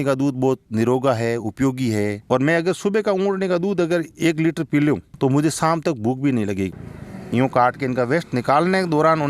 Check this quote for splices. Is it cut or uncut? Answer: cut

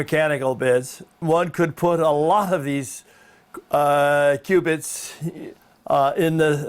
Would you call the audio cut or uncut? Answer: cut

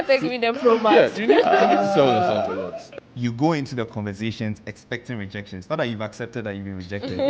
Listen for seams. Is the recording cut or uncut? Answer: cut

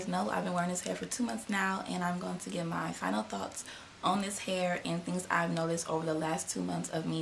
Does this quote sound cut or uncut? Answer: cut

